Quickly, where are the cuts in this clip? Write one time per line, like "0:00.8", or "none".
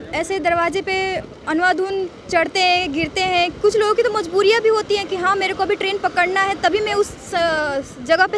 none